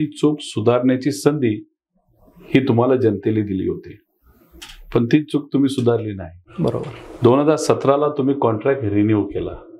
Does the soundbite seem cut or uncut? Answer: uncut